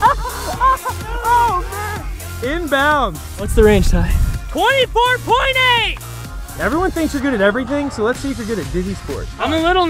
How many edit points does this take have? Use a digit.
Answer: 1